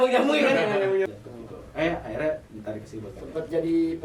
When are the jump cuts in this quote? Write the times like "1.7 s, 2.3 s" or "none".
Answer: 1.1 s